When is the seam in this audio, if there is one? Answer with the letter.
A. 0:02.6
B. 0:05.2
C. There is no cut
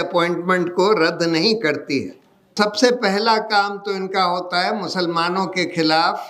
A